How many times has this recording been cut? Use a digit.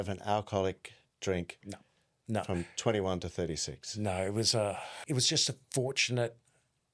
1